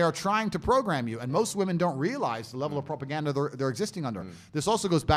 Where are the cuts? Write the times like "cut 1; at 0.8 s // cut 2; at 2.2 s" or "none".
none